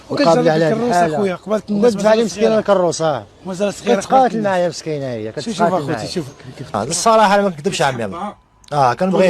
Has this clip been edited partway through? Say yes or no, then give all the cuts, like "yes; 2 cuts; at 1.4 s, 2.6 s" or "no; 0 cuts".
yes; 1 cut; at 6.8 s